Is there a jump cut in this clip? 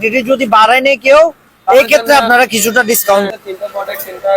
yes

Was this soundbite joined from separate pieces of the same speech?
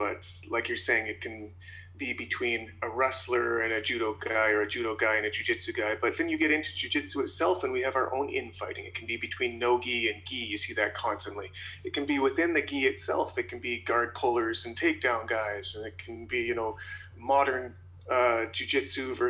no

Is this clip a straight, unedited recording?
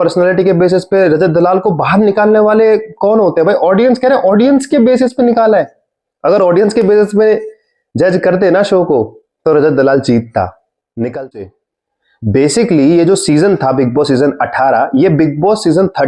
no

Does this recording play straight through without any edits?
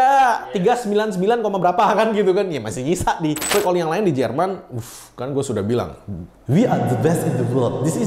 no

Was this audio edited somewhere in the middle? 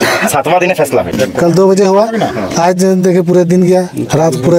yes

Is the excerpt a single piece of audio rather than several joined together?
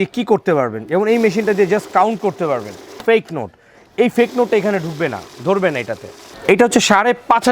no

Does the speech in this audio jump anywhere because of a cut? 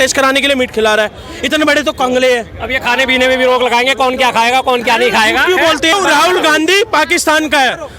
yes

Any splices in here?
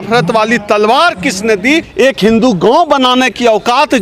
yes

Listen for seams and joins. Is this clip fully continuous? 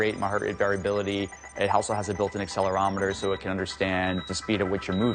no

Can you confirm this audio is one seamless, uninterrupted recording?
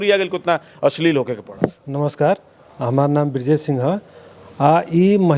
yes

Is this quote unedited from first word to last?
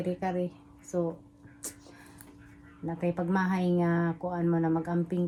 yes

